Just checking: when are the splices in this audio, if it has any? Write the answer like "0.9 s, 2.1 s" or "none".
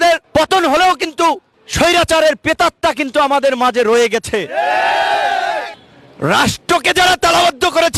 5.7 s